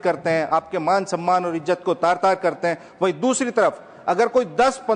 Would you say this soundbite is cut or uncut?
uncut